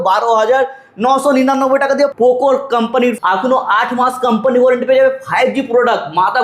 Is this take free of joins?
no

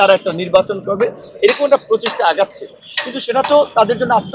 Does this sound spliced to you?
no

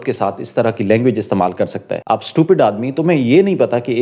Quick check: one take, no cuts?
no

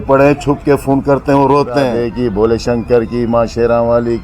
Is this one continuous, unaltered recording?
no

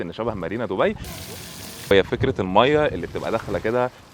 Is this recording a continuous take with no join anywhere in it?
no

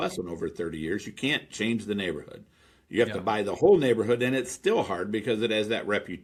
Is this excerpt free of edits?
yes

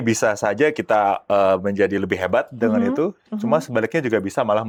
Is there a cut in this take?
no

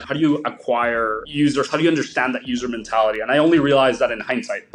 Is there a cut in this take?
no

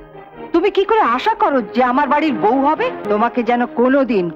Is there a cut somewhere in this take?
yes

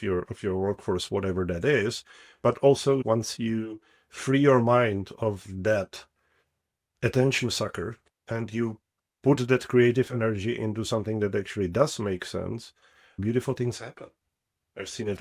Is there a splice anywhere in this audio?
yes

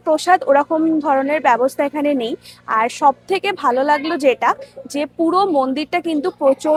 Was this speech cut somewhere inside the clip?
no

